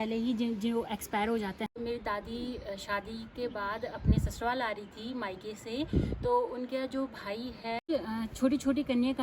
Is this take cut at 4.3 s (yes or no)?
no